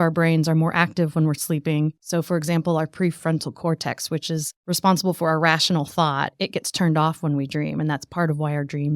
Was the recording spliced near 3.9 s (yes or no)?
no